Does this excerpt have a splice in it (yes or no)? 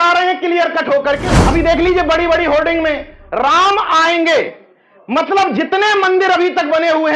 yes